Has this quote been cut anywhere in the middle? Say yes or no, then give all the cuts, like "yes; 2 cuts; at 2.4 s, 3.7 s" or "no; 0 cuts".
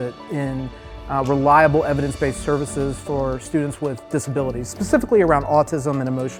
no; 0 cuts